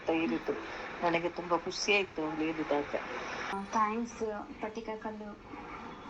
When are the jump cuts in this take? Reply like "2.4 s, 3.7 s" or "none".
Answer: 3.5 s